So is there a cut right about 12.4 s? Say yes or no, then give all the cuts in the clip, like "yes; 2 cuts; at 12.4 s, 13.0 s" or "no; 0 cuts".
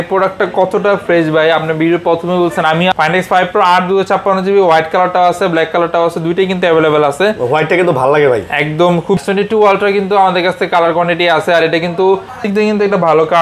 yes; 3 cuts; at 2.9 s, 9.2 s, 12.4 s